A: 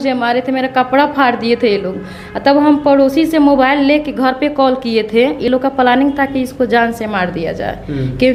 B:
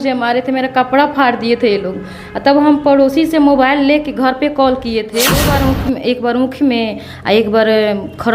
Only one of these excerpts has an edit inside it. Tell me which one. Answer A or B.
B